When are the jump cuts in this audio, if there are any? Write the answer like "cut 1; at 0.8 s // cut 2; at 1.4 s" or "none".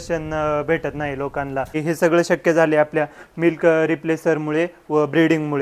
cut 1; at 1.7 s